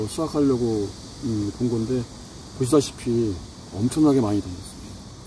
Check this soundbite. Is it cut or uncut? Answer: uncut